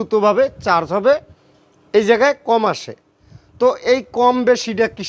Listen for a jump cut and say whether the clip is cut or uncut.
cut